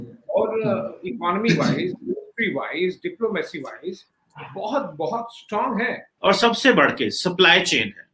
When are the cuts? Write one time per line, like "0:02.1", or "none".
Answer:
0:06.0